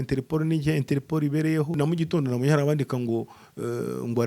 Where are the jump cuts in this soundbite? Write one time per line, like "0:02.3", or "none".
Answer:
0:01.8